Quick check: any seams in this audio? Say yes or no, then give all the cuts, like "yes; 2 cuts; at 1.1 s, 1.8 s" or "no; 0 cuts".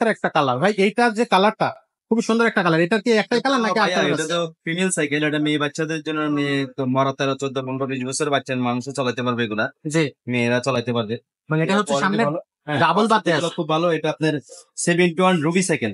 no; 0 cuts